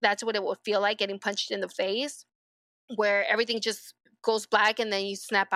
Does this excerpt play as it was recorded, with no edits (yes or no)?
yes